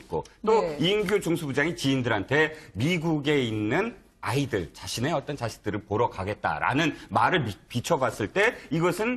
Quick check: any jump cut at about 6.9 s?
yes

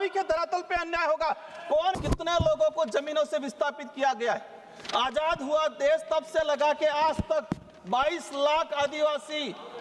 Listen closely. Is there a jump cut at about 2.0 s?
yes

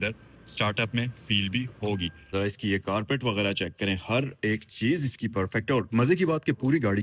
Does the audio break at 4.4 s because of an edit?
no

